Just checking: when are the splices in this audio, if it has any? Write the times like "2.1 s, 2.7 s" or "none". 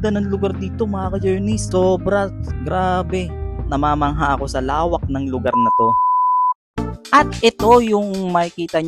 none